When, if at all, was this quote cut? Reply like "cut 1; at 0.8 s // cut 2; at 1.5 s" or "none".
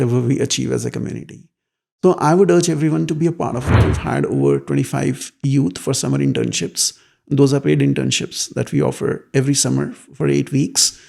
cut 1; at 3.8 s